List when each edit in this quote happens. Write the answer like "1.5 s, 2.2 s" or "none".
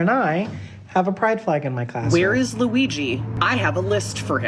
2.0 s, 3.3 s